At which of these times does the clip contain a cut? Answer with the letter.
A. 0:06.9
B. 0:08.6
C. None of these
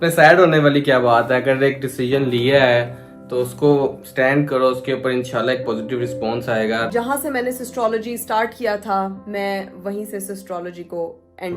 A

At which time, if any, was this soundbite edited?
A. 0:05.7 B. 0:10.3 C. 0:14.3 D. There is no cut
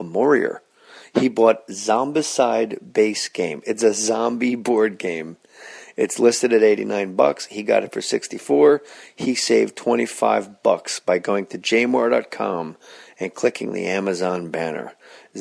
D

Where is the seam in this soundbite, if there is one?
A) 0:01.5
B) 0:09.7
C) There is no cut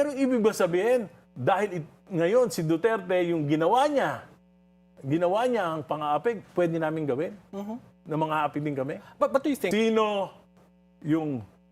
B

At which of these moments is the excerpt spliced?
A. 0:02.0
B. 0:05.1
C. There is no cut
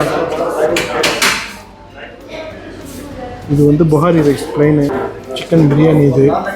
B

